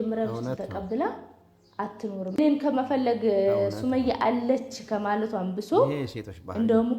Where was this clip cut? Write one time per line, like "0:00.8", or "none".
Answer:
0:02.4